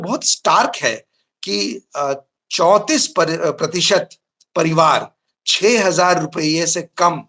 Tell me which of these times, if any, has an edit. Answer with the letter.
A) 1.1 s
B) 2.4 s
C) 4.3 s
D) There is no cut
D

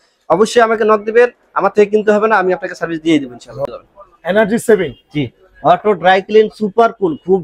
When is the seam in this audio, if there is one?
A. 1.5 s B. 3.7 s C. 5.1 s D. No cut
B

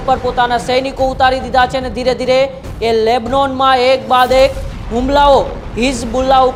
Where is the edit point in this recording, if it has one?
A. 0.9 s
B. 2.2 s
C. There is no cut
C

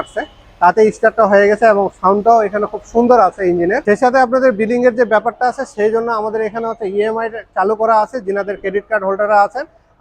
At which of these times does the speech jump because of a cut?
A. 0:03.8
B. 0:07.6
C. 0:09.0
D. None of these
A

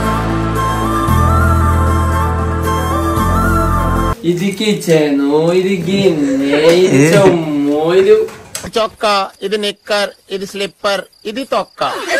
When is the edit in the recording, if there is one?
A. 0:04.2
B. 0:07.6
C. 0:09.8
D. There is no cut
A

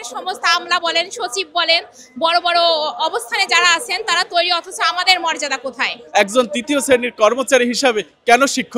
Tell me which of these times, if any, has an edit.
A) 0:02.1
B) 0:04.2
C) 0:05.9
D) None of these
C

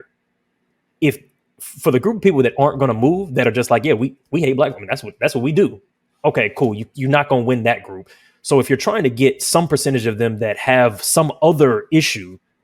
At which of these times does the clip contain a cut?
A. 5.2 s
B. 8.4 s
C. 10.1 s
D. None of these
D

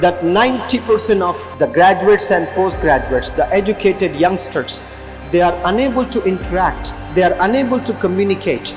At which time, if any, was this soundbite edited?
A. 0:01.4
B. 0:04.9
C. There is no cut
A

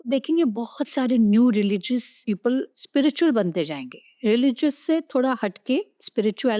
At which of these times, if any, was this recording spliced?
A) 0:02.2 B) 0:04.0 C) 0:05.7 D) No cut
A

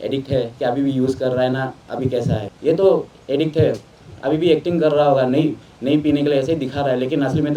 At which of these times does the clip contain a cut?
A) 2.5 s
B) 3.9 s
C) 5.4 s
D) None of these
A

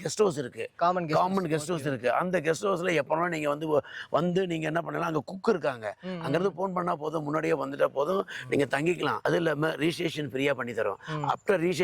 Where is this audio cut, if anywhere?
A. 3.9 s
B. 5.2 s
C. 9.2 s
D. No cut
C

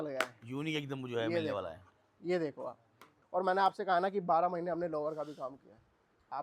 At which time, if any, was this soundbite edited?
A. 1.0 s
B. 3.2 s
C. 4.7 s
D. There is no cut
B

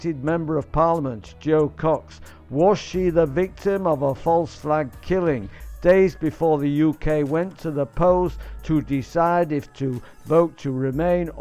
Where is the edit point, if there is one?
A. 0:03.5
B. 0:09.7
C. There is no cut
A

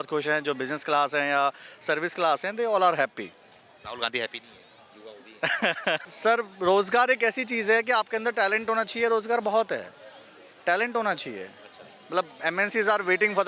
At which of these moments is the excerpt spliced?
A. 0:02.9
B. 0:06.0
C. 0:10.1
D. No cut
B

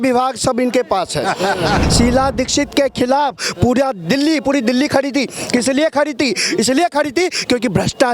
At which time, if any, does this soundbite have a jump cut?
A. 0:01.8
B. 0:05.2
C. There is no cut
A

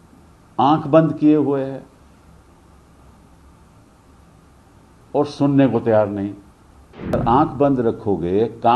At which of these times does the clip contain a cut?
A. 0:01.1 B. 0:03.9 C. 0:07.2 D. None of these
C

